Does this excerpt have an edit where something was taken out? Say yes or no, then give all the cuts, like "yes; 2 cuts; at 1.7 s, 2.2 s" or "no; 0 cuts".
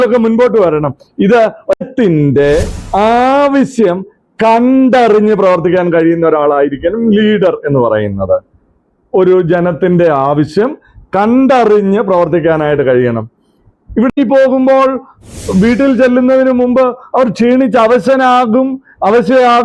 yes; 2 cuts; at 1.8 s, 14.1 s